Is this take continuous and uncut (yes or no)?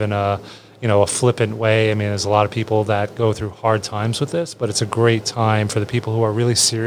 yes